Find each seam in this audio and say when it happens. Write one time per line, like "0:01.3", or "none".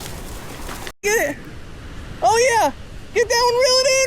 0:01.0